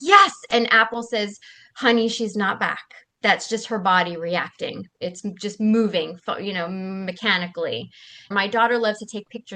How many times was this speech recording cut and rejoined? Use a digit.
1